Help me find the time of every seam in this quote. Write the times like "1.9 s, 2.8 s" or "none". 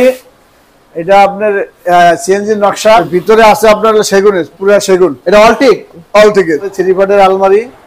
3.1 s, 6.7 s

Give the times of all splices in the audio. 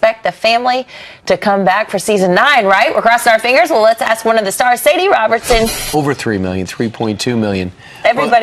none

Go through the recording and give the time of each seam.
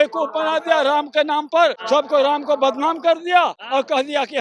1.8 s, 3.6 s

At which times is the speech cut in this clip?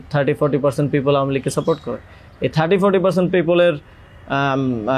none

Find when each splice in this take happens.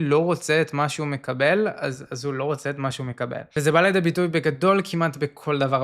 3.4 s

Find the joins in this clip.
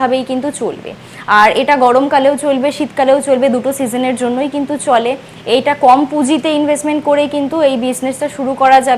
none

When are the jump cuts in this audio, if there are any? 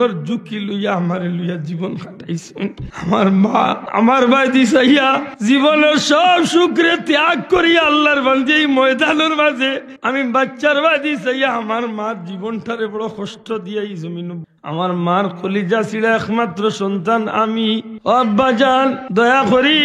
2.9 s, 3.8 s, 5.3 s, 9.9 s, 14.4 s, 17.9 s, 19.0 s

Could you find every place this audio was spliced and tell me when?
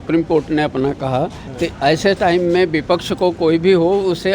none

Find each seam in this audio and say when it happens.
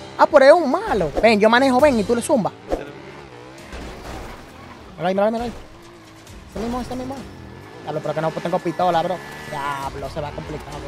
3.2 s

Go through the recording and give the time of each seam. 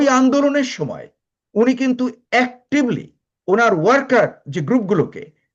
none

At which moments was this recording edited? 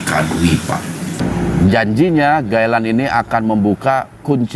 1.2 s

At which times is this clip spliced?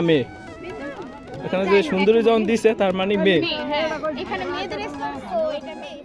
none

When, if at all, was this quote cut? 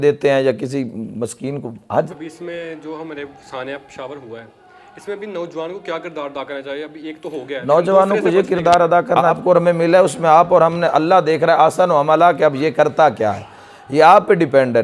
2.1 s, 9.4 s

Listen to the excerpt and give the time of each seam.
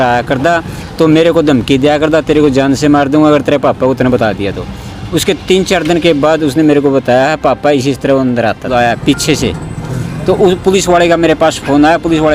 8.7 s

